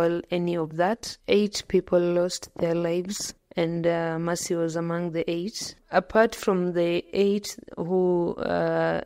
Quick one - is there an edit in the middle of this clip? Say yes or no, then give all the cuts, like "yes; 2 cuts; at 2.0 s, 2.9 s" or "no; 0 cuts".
yes; 2 cuts; at 1.1 s, 5.8 s